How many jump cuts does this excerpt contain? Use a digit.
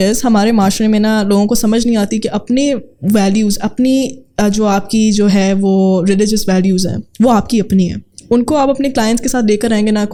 0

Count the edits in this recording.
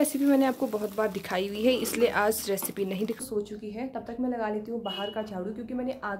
1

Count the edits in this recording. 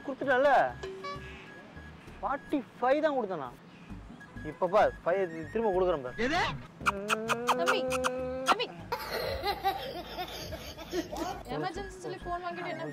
0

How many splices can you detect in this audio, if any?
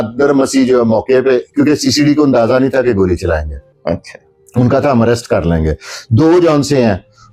0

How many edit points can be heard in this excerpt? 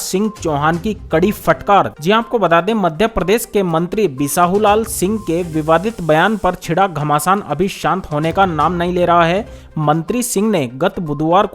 0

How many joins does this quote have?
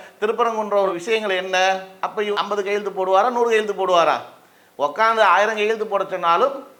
0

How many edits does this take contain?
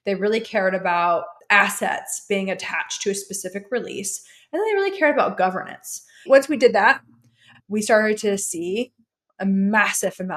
3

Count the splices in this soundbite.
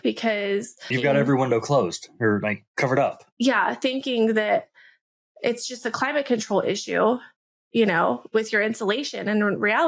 1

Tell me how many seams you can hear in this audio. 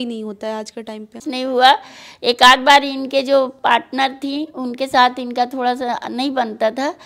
1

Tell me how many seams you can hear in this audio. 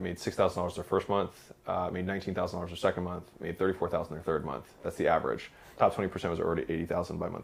0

